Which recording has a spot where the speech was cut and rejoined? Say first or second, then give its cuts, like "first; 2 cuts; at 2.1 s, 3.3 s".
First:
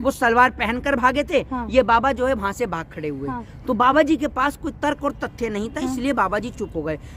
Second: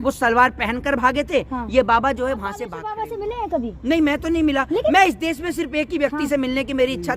second; 1 cut; at 2.8 s